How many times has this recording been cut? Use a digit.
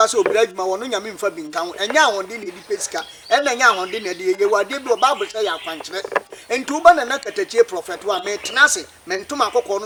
0